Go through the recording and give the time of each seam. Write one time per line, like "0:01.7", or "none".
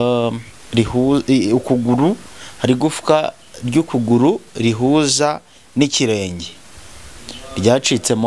none